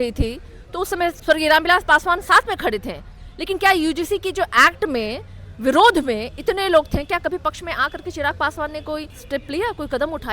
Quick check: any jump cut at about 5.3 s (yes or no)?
no